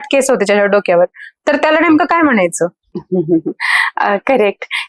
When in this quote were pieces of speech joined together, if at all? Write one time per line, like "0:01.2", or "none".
none